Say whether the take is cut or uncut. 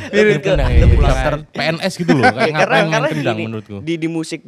cut